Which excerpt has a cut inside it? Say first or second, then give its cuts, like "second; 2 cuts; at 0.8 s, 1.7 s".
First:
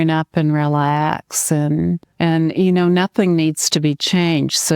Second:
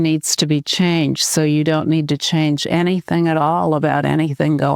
first; 1 cut; at 2.1 s